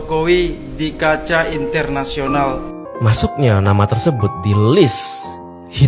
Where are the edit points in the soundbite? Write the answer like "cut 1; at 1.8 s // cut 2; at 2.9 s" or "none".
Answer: cut 1; at 2.8 s